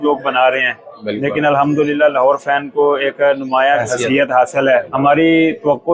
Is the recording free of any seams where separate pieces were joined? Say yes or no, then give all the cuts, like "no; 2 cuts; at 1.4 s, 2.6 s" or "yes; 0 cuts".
no; 2 cuts; at 3.8 s, 4.9 s